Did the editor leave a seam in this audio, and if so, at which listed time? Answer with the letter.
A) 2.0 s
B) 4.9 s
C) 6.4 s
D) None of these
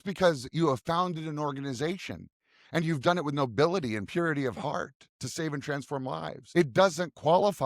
C